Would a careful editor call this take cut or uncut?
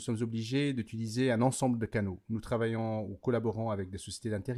uncut